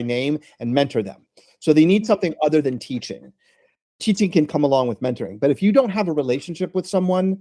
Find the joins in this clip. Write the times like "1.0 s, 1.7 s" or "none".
4.0 s

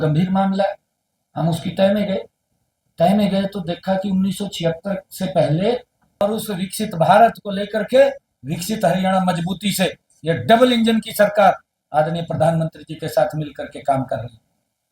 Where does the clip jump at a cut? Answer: 6.2 s

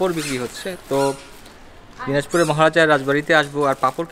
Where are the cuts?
none

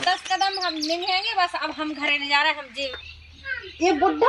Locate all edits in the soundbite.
2.7 s

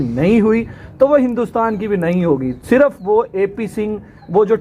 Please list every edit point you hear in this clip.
none

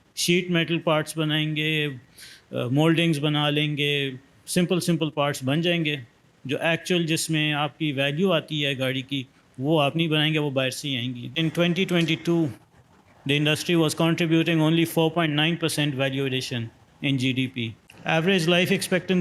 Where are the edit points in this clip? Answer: 11.3 s, 17.8 s

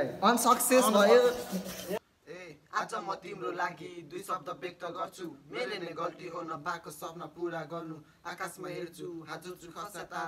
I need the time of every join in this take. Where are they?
2.0 s

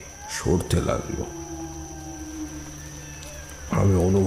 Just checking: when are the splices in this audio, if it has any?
1.3 s

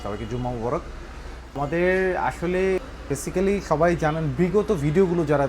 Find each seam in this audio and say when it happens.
1.6 s, 2.9 s

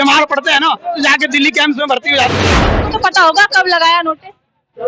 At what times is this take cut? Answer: 2.7 s

